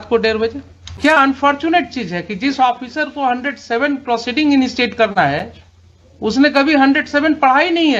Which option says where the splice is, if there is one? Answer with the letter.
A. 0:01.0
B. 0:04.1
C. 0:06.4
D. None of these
A